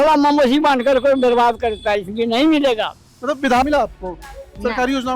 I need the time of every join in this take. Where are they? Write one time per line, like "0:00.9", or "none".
0:03.6